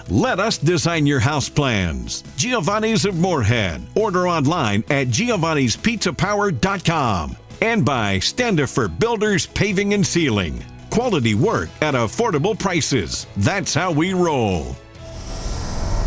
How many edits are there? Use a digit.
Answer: 1